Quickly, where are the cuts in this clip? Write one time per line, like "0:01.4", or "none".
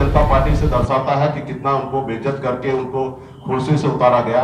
none